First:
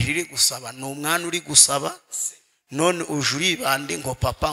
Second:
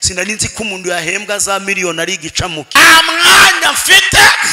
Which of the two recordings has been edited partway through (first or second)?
second